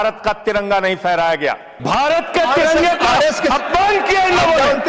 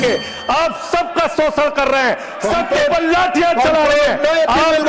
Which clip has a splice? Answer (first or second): first